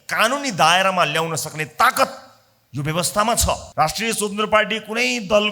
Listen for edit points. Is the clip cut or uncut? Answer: cut